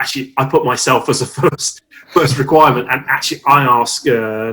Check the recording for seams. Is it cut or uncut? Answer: uncut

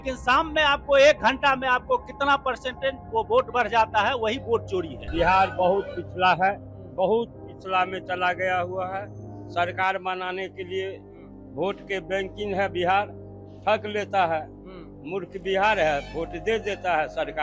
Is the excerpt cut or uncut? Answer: cut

